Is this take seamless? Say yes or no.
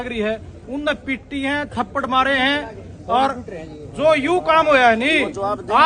yes